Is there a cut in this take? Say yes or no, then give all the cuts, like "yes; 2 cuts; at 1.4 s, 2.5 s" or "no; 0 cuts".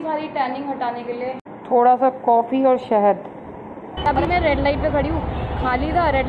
yes; 2 cuts; at 1.5 s, 4.1 s